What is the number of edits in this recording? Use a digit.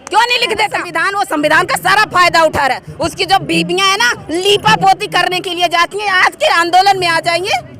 1